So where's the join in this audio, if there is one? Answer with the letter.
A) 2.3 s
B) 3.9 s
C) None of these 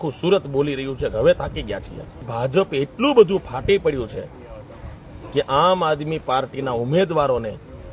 A